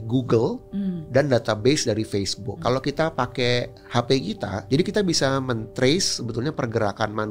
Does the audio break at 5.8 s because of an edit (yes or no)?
no